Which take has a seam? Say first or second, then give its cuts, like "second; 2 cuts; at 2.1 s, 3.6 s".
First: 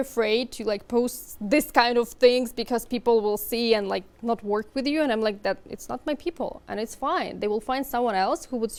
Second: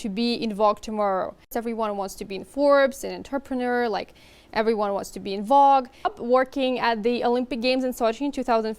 second; 2 cuts; at 1.5 s, 6.1 s